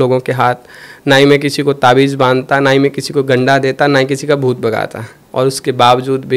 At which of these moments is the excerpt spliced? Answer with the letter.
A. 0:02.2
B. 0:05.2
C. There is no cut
B